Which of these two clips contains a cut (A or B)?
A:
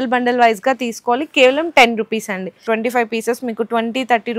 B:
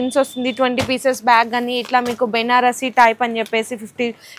A